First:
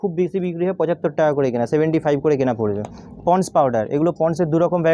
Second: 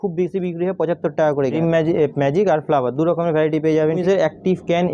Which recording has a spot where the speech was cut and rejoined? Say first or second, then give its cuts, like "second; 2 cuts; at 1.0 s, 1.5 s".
second; 2 cuts; at 1.5 s, 4.0 s